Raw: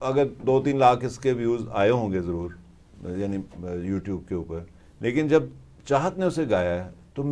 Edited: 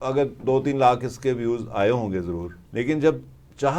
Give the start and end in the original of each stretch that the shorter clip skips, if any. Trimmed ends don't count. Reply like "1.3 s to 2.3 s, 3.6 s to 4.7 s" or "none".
2.6 s to 4.8 s